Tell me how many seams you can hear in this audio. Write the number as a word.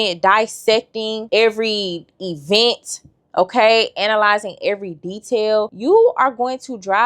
one